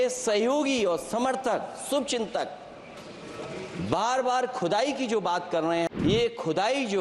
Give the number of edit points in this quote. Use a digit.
1